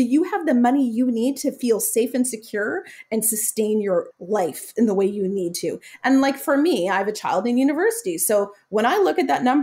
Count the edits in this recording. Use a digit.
1